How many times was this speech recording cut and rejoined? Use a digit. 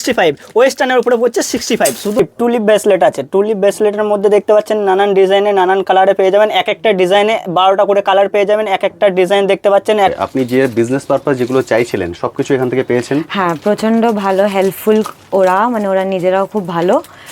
2